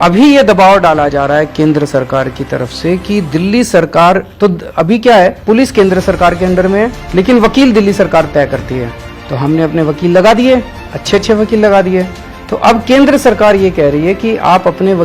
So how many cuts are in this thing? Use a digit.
1